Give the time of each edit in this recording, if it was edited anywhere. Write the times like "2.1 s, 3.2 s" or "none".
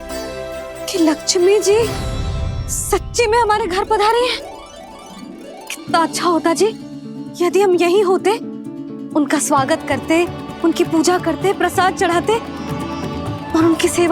none